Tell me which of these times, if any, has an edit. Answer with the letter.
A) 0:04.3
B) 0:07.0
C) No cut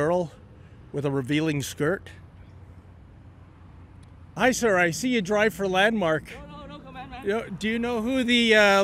A